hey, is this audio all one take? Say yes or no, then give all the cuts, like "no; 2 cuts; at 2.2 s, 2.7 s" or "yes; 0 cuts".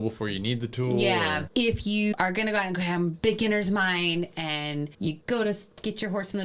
yes; 0 cuts